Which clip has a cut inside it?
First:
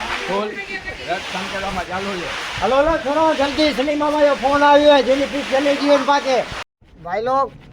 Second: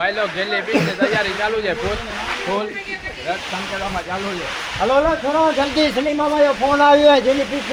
first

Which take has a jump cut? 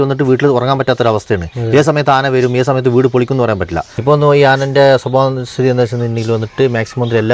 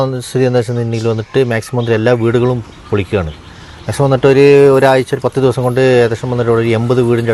first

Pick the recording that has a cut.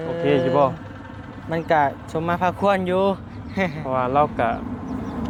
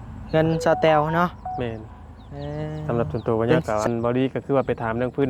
second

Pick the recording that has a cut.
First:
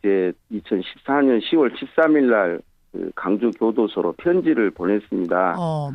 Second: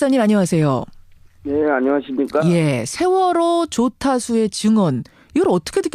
second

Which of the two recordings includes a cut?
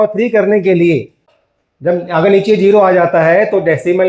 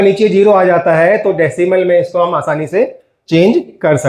first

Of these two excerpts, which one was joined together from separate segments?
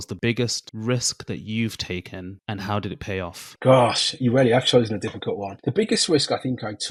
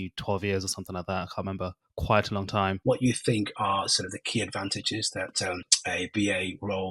second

